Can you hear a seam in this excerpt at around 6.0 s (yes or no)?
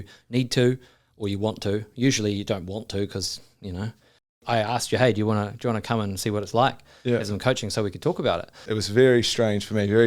no